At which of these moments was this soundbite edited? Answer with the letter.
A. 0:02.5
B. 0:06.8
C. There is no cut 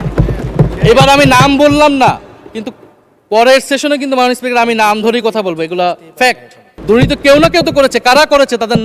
B